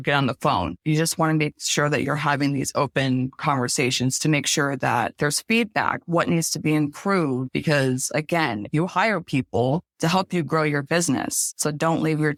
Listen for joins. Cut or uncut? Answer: uncut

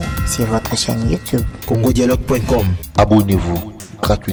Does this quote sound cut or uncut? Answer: uncut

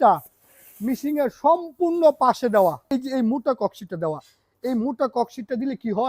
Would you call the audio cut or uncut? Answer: cut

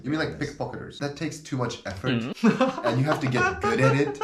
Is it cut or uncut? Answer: cut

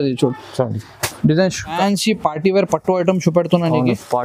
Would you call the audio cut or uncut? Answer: cut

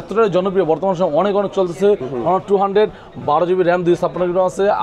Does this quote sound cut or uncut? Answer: uncut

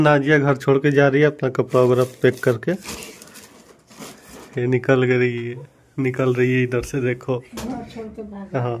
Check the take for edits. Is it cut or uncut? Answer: uncut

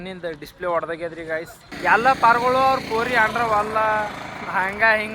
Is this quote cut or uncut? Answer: cut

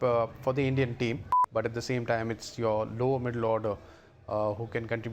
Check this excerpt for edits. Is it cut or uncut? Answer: cut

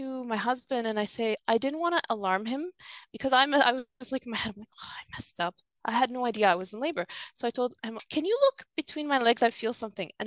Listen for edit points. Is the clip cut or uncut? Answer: cut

